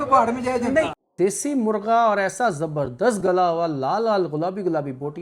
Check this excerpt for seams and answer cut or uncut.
cut